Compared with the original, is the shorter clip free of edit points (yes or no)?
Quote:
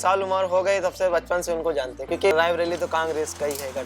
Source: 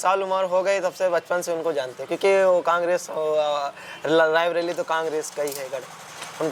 no